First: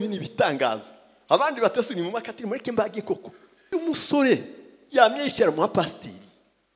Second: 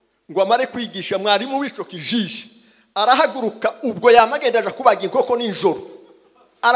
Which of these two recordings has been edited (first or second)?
first